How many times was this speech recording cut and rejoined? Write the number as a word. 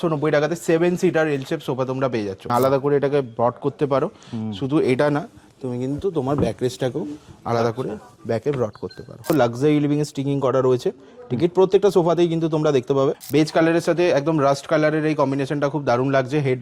three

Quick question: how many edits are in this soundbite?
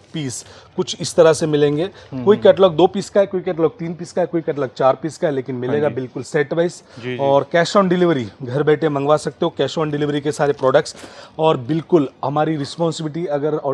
zero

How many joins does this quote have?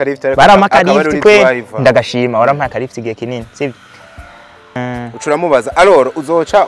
one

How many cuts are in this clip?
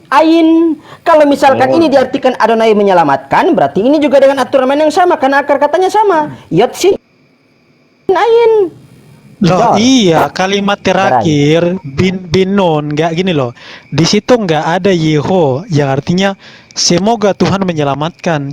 zero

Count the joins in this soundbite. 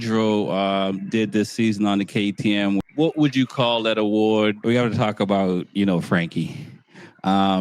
two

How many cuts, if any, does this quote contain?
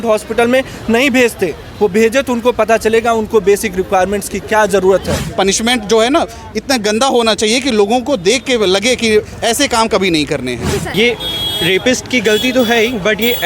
two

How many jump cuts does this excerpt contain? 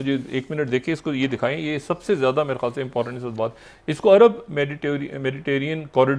zero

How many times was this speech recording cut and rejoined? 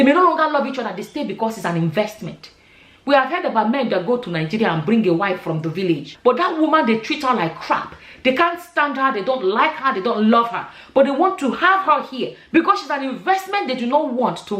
one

